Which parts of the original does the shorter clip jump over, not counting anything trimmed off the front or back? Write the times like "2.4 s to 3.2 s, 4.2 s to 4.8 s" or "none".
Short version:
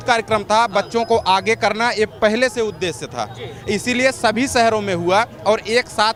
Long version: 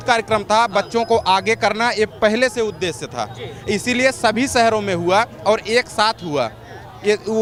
none